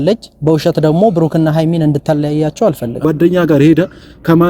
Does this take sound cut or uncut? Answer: cut